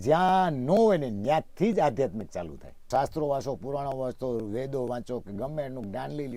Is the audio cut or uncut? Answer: cut